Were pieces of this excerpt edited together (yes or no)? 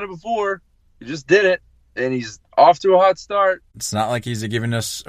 yes